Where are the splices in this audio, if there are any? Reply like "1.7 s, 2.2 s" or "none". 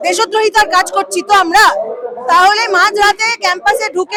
none

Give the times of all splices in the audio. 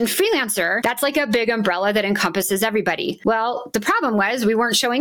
3.1 s

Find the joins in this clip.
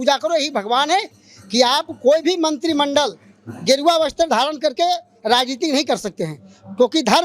1.2 s

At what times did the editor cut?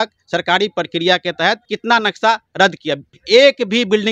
1.7 s, 3.1 s

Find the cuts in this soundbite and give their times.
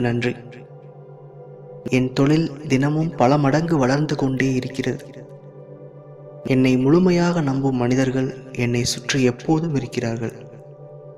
none

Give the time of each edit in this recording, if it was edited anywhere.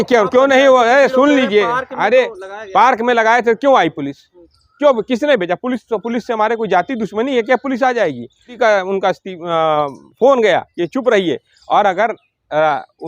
8.5 s

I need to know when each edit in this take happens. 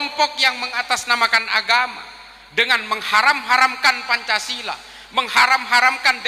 none

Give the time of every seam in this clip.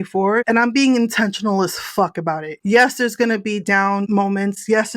4.1 s

